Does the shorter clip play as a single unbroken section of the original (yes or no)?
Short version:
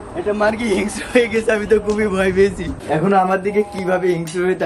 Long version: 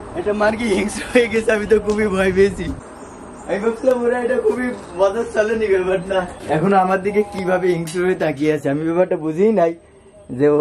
no